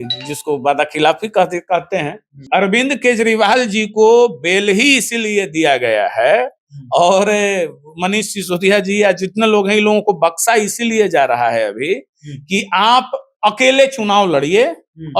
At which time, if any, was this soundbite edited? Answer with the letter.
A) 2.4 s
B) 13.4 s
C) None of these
A